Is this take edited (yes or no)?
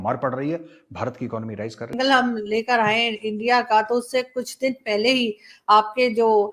yes